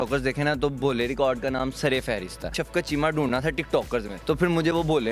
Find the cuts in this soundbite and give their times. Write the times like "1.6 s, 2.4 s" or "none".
2.6 s, 4.1 s

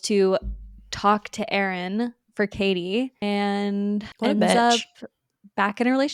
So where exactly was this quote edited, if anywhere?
3.2 s, 4.1 s

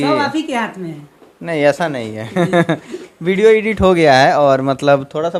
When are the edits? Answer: none

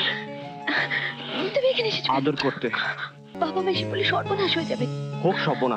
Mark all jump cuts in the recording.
3.3 s

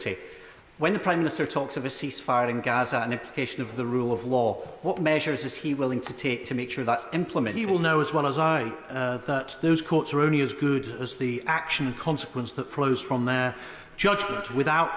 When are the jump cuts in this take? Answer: 7.6 s

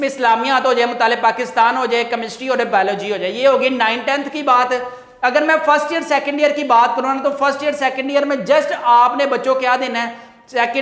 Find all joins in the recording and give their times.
none

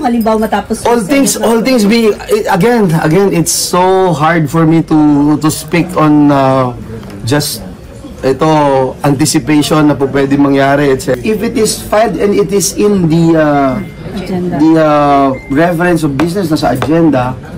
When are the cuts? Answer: 11.1 s

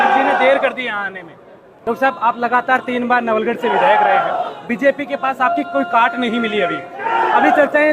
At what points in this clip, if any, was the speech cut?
1.6 s

